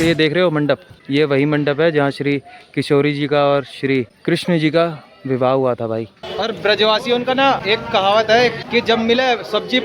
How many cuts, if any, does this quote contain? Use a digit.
2